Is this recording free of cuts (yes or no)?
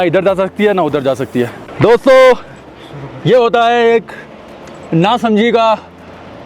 no